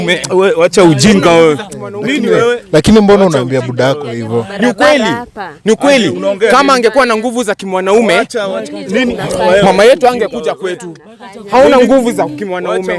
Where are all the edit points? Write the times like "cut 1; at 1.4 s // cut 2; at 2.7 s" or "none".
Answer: none